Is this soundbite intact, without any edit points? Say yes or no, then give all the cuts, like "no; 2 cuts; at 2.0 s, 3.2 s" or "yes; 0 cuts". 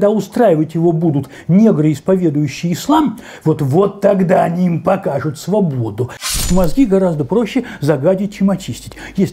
no; 1 cut; at 6.4 s